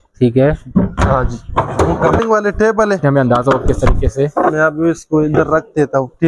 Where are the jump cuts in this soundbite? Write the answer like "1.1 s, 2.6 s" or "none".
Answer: 2.2 s, 3.0 s